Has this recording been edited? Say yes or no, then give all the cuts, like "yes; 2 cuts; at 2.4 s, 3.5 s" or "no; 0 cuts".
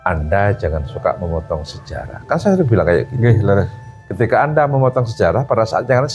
no; 0 cuts